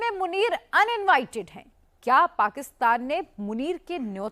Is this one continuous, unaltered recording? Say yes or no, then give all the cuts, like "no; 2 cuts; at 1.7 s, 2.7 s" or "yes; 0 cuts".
yes; 0 cuts